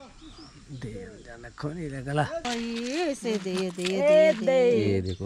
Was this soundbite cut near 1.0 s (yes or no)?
no